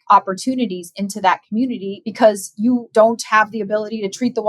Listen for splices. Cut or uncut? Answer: cut